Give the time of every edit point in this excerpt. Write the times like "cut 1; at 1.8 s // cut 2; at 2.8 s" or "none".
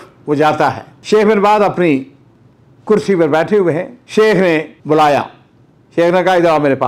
cut 1; at 0.9 s // cut 2; at 4.0 s // cut 3; at 4.7 s